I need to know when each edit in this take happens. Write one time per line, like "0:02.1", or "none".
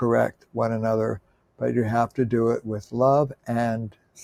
none

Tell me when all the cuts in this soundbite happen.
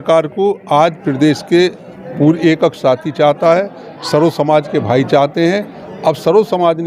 none

